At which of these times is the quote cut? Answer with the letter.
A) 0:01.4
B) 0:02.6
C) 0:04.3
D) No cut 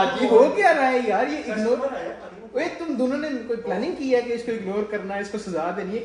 D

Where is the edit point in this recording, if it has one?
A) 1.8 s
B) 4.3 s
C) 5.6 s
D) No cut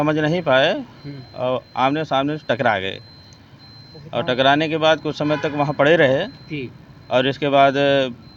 D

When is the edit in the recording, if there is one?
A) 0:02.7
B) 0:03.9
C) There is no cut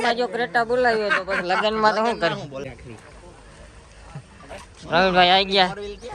A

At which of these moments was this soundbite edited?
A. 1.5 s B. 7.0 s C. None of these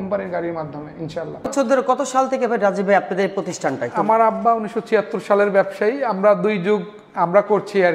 A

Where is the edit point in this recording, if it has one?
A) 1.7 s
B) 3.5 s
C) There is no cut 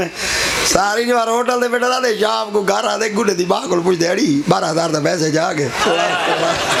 C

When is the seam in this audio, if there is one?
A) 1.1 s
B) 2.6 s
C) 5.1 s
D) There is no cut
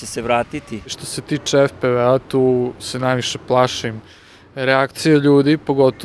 A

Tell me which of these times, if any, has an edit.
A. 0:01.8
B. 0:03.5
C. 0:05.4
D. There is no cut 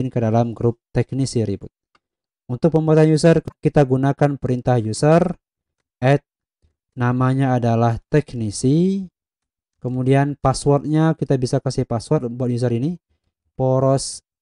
B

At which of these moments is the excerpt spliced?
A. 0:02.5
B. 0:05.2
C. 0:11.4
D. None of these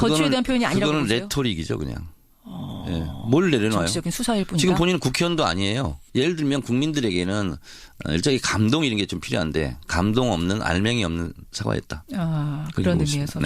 B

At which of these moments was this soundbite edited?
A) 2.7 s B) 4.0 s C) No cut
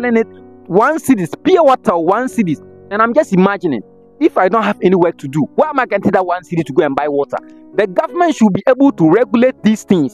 C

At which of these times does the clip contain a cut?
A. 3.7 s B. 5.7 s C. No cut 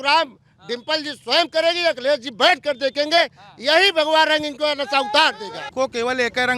B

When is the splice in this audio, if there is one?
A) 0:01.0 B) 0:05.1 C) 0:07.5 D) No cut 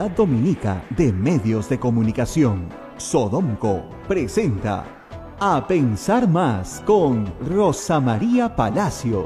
D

